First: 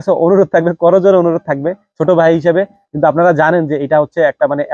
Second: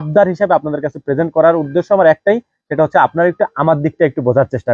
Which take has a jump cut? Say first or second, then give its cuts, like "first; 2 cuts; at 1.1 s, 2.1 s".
first; 1 cut; at 2.8 s